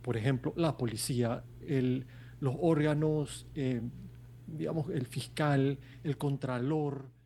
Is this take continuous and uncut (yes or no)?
yes